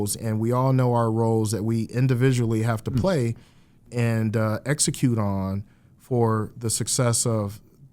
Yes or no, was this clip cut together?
yes